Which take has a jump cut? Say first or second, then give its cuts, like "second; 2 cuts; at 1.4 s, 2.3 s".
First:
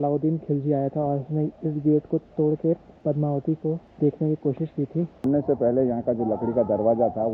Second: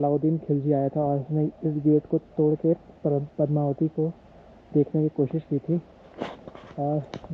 first; 3 cuts; at 2.9 s, 3.9 s, 5.2 s